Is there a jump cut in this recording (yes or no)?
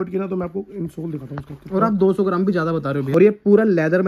yes